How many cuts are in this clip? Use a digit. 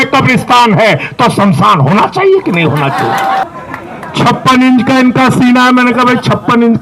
1